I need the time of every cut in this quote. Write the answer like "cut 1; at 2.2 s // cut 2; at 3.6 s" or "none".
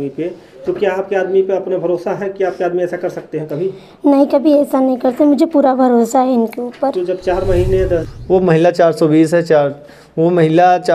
cut 1; at 8.0 s

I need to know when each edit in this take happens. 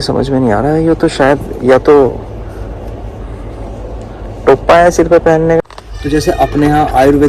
cut 1; at 5.6 s

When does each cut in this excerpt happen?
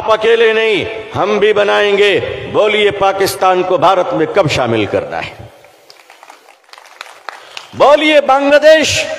cut 1; at 6.7 s

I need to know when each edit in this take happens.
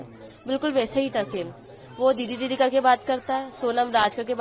none

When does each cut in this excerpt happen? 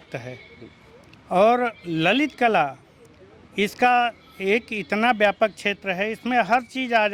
none

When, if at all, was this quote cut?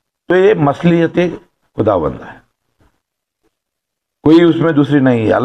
none

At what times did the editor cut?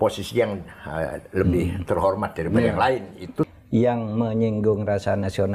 cut 1; at 3.5 s

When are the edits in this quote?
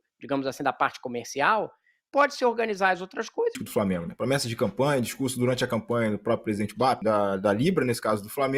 cut 1; at 3.6 s // cut 2; at 7.0 s

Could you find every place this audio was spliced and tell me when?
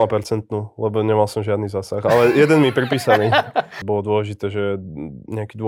cut 1; at 3.8 s

